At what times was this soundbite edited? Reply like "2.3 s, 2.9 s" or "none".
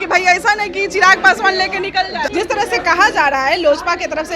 2.3 s